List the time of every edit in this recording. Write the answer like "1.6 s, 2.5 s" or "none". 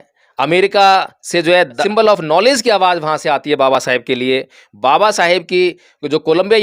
1.8 s

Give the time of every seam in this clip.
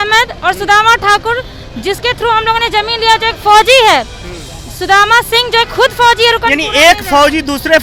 none

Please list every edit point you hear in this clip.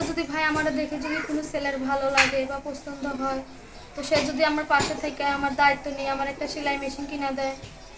none

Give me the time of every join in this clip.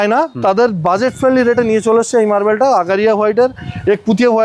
none

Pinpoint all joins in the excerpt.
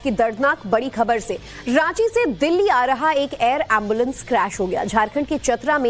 4.4 s

